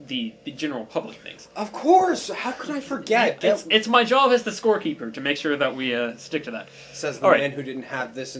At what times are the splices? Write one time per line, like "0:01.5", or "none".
0:02.9